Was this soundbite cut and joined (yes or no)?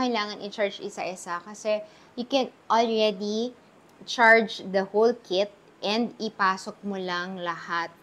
no